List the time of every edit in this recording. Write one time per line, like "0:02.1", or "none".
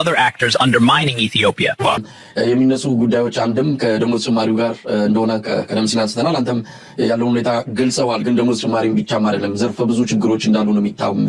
0:02.0

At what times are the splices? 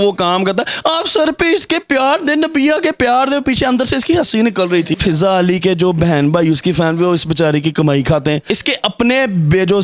0:04.9
0:08.4

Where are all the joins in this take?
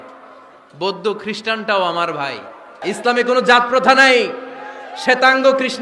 0:02.8

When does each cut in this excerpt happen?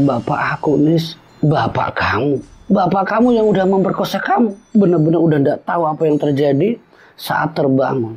0:04.6

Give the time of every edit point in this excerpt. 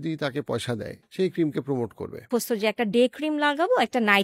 0:01.0
0:02.2

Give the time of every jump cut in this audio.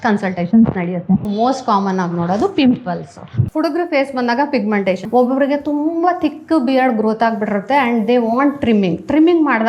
0:01.3
0:03.3
0:05.0

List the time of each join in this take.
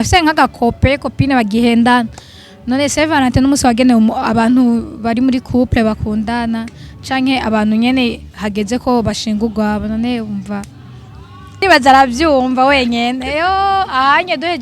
0:11.5

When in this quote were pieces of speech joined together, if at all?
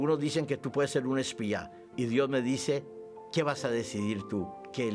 0:01.8

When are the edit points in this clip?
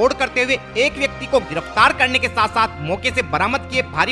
none

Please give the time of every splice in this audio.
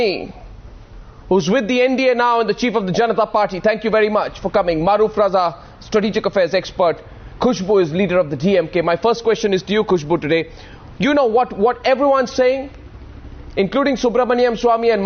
0:01.9

